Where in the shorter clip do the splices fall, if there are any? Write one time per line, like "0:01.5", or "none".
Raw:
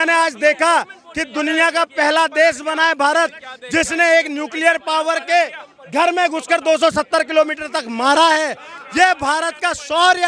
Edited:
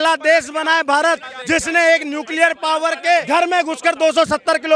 0:01.3
0:03.2